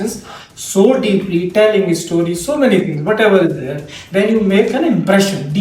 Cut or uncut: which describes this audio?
uncut